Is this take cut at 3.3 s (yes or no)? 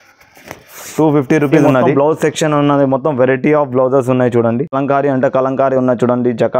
no